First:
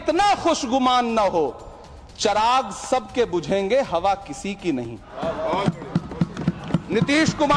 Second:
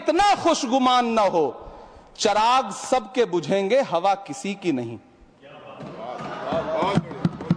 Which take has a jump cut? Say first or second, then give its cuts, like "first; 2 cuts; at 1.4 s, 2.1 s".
first; 1 cut; at 5.0 s